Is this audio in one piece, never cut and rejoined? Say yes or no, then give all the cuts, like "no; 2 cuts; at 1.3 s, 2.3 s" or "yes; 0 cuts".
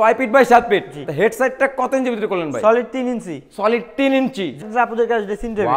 no; 1 cut; at 4.6 s